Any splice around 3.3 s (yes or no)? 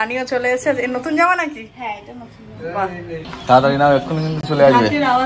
yes